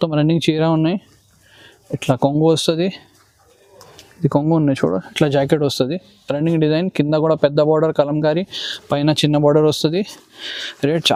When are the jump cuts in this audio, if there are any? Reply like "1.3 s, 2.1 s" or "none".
none